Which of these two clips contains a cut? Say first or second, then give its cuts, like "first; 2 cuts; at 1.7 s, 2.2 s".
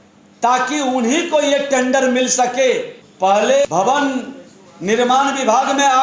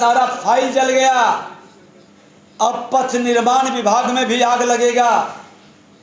first; 2 cuts; at 3.0 s, 3.7 s